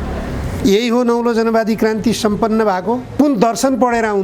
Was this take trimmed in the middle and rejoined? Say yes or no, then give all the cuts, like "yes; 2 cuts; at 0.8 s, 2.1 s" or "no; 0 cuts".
yes; 1 cut; at 3.2 s